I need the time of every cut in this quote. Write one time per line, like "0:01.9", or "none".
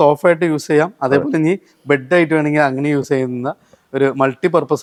none

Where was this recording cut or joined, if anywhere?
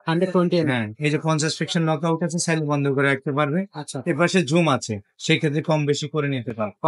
none

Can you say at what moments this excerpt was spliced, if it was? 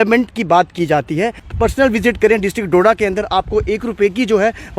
0:01.4

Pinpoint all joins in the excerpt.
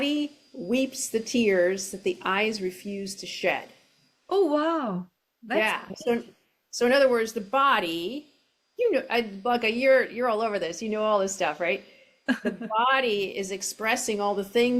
none

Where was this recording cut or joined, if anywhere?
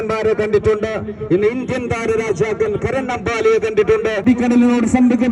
0:04.2

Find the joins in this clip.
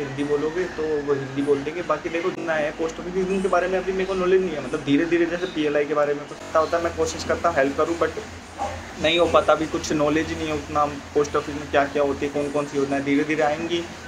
0:02.4
0:06.5

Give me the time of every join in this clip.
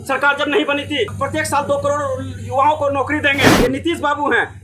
0:01.1
0:03.5

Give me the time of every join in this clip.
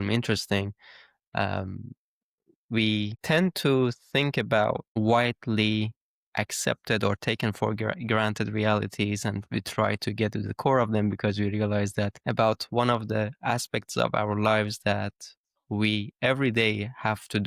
0:03.2
0:04.9
0:12.2

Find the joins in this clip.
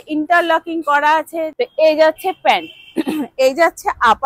0:01.5

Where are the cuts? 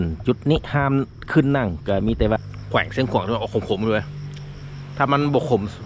0:02.4

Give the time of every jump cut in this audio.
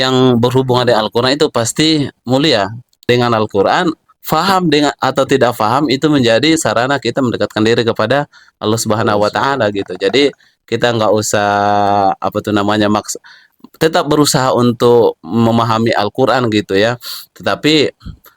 0:03.0

